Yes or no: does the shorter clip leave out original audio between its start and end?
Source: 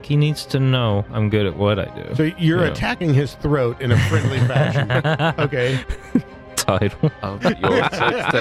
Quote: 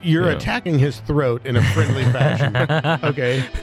no